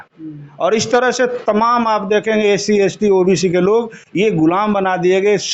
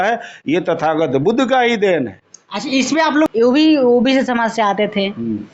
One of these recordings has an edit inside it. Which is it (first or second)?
second